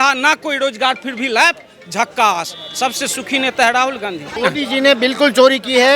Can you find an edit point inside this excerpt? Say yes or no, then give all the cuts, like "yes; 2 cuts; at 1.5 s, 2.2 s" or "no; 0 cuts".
yes; 1 cut; at 4.3 s